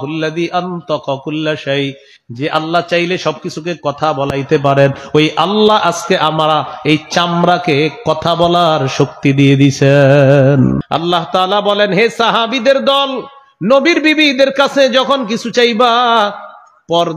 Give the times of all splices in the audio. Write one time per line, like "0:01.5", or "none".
0:10.8